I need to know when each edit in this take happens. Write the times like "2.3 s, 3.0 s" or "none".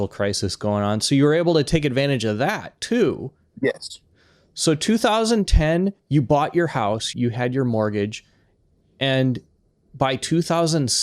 6.0 s, 7.1 s